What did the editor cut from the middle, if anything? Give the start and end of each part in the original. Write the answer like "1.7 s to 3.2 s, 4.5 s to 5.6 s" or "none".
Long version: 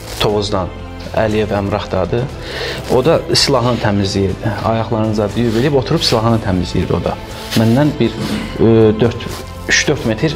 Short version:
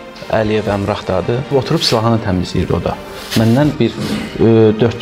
2.3 s to 5.7 s